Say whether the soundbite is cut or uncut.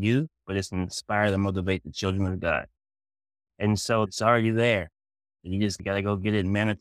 cut